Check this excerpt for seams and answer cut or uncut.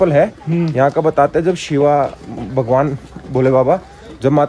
uncut